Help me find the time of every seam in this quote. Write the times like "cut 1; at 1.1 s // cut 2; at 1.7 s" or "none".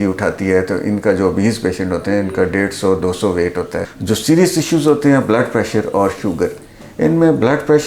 cut 1; at 3.9 s